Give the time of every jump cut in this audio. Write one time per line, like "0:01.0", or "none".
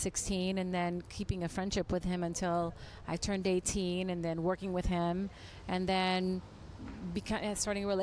none